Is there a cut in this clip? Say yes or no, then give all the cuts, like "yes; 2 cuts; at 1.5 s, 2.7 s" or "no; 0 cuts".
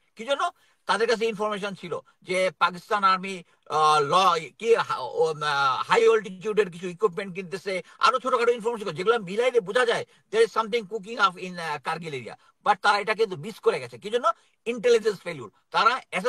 no; 0 cuts